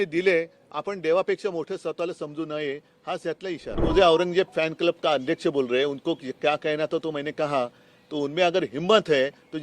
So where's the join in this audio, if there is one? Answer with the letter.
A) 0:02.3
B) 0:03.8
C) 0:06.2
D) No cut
B